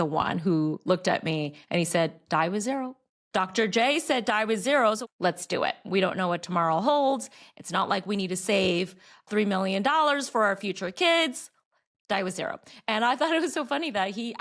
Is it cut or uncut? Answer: cut